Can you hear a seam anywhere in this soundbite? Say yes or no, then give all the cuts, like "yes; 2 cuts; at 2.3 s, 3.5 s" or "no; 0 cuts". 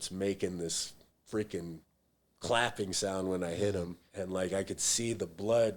yes; 1 cut; at 4.0 s